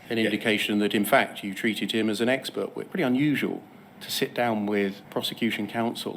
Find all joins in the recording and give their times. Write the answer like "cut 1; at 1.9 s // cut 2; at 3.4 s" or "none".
cut 1; at 2.8 s // cut 2; at 5.0 s